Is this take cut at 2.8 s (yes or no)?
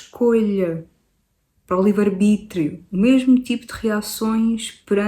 yes